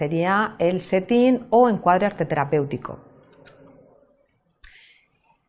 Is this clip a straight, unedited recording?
no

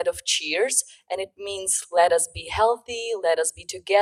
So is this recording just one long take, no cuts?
yes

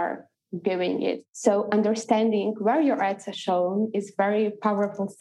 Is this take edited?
yes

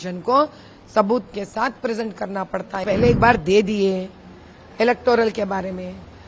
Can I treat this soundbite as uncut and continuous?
no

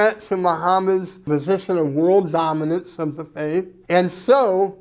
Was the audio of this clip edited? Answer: yes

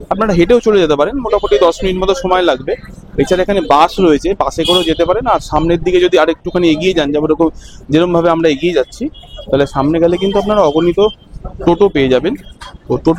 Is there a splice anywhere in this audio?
no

